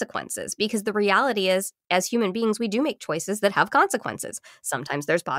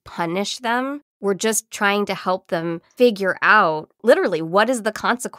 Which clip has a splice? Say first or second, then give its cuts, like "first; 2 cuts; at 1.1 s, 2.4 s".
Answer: second; 3 cuts; at 1.1 s, 2.8 s, 3.9 s